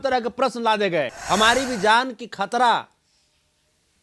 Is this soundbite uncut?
no; 1 cut; at 1.2 s

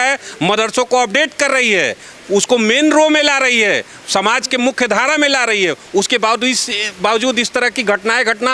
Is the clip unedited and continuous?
yes; 0 cuts

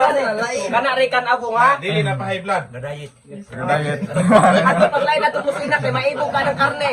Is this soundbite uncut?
yes; 0 cuts

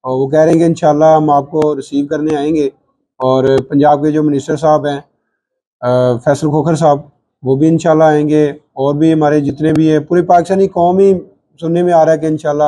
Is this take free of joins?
yes; 0 cuts

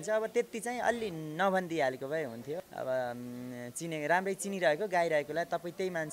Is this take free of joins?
no; 1 cut; at 2.6 s

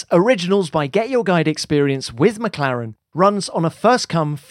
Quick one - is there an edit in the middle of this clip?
no; 0 cuts

